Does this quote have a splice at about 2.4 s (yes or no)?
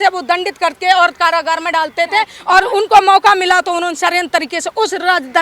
yes